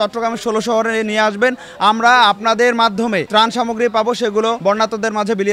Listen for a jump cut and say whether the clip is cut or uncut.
cut